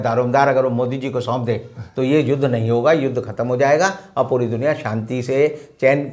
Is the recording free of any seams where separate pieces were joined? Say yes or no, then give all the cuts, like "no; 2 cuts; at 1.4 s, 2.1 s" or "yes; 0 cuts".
yes; 0 cuts